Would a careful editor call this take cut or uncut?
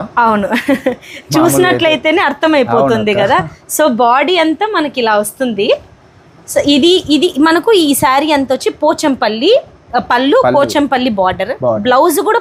uncut